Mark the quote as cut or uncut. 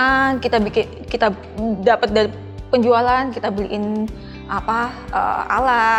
uncut